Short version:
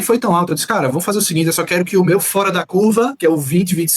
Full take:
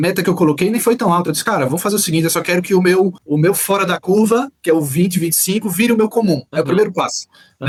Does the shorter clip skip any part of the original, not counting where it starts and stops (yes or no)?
yes